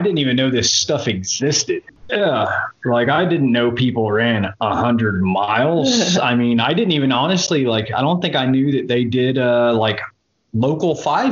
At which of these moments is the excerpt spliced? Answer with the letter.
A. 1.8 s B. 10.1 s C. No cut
A